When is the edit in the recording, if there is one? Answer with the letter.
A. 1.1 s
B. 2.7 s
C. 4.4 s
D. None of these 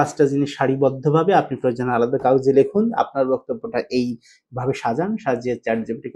D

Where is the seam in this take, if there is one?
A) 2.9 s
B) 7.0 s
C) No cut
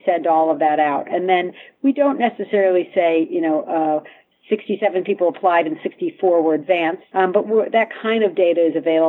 B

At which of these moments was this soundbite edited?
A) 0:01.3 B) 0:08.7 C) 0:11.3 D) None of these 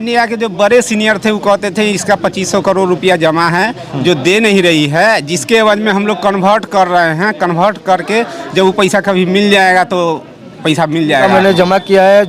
C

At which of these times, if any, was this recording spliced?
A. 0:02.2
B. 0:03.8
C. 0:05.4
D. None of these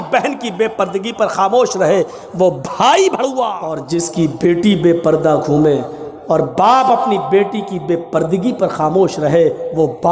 B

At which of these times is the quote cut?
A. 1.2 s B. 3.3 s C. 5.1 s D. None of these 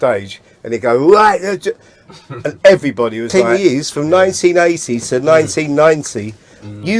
B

